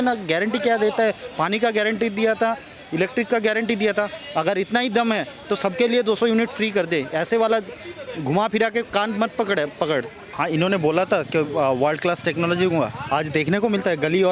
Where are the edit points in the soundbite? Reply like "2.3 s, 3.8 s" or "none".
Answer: 10.2 s